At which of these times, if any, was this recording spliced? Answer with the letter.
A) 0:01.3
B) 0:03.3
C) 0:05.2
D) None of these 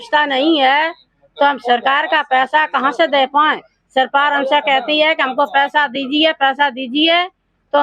D